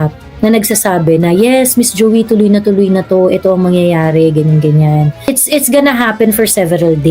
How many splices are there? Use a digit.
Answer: 1